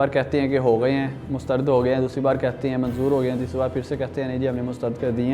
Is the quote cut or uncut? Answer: uncut